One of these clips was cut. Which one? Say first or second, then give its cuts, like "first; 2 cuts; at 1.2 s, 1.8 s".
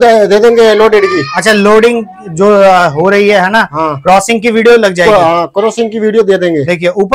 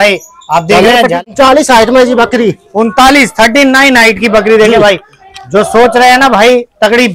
second; 1 cut; at 1.2 s